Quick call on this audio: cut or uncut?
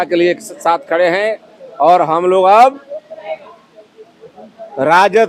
uncut